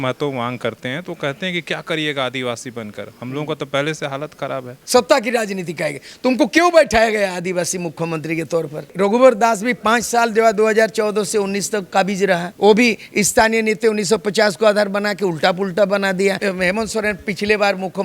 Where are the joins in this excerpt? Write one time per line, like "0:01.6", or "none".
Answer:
0:04.8
0:08.8
0:16.4